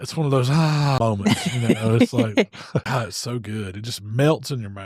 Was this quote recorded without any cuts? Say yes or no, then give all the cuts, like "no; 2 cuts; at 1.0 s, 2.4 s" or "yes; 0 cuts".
no; 2 cuts; at 1.0 s, 2.8 s